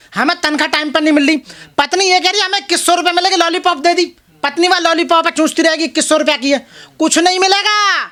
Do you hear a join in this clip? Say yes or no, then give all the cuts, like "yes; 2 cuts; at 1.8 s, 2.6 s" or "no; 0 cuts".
no; 0 cuts